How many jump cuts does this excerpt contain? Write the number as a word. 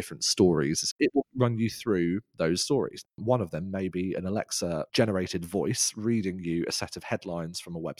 two